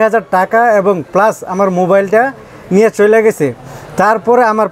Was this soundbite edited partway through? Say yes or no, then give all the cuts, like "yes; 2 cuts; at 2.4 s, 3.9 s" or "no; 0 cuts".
no; 0 cuts